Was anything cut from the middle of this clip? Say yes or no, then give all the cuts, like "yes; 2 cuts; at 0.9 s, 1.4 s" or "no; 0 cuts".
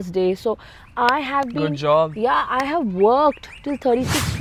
no; 0 cuts